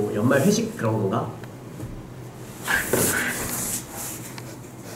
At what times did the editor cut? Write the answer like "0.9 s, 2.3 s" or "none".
2.2 s